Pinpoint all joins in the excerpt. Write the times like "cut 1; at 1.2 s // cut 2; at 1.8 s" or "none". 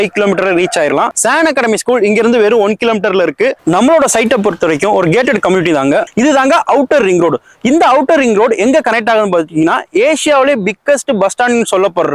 cut 1; at 1.2 s // cut 2; at 3.6 s // cut 3; at 6.1 s